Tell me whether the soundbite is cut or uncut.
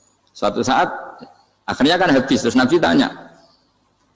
uncut